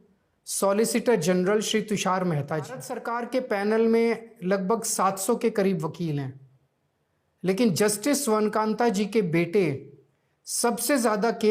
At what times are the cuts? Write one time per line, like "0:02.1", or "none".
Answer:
0:02.9